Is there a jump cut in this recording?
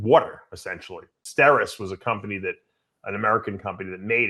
yes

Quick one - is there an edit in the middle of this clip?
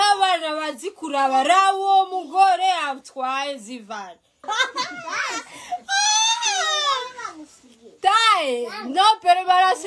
no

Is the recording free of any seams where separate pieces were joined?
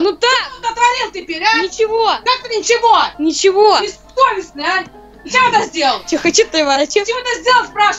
yes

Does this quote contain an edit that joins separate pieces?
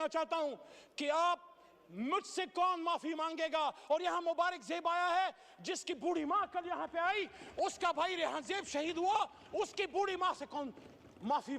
no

